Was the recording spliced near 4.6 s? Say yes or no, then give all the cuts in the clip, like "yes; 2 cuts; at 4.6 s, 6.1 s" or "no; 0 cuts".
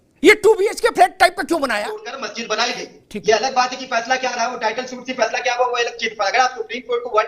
no; 1 cut; at 2.3 s